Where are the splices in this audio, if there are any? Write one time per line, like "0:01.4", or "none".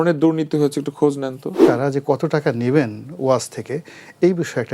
0:01.6